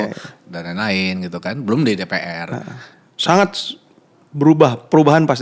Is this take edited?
no; 0 cuts

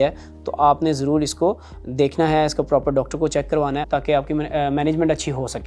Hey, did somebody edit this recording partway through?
no; 0 cuts

